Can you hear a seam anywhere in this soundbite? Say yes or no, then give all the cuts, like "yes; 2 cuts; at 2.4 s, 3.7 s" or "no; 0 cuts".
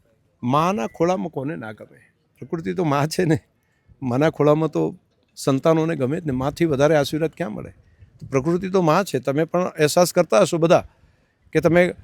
no; 0 cuts